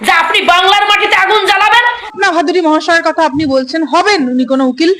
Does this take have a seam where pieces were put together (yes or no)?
yes